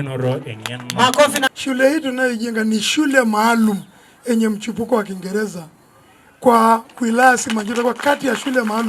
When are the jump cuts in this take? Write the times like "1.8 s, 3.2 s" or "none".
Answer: 1.4 s